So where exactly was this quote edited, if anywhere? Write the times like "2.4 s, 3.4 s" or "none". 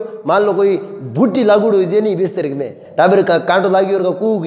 2.8 s